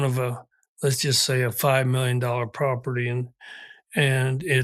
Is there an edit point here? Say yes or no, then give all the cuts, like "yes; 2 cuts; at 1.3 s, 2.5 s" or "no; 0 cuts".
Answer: no; 0 cuts